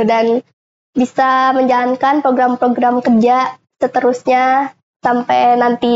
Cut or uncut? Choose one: uncut